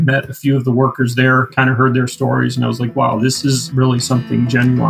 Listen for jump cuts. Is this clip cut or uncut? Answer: cut